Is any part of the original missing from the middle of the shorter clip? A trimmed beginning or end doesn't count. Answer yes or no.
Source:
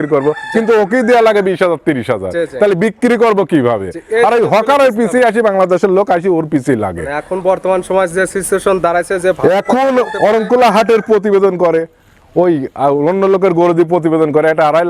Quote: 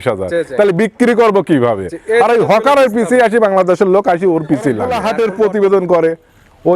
yes